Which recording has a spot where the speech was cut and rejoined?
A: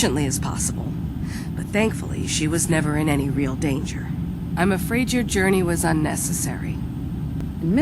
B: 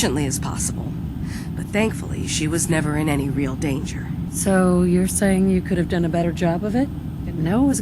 B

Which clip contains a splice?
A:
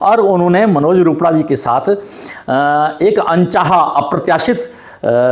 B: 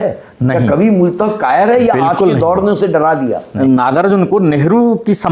B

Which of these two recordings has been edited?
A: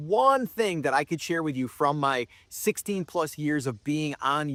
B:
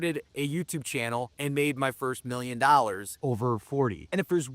B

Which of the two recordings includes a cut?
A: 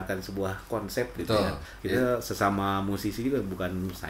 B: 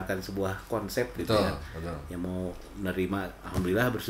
A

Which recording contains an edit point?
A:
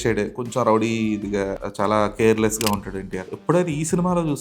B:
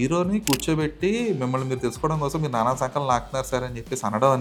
A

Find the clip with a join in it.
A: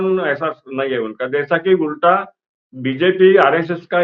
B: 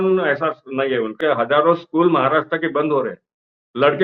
B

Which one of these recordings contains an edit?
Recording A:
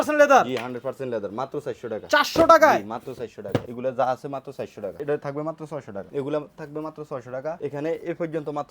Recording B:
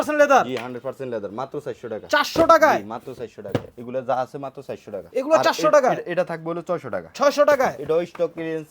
A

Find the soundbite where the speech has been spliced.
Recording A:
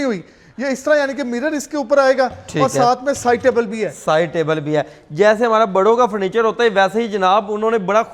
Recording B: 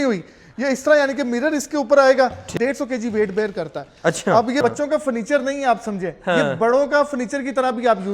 B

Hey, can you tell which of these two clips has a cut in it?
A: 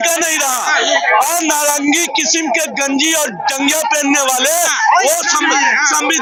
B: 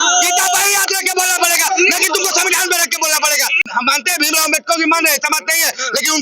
B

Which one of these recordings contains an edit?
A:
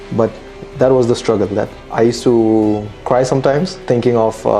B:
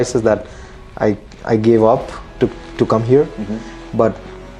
A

